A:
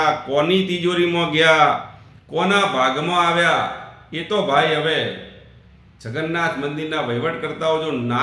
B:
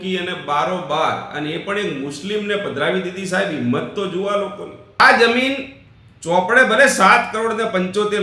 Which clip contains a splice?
B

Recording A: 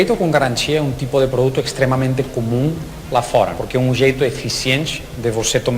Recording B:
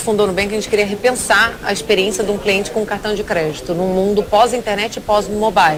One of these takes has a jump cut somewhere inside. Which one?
A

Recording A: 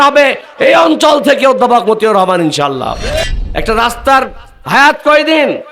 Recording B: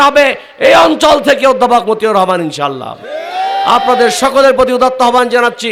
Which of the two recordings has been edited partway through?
A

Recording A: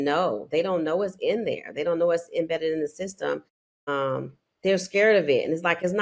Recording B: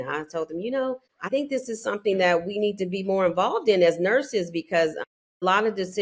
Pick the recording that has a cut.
B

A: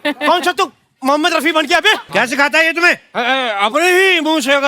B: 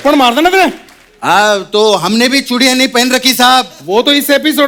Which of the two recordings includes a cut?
A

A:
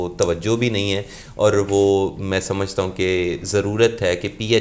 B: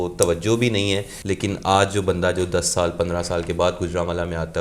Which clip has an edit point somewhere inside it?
B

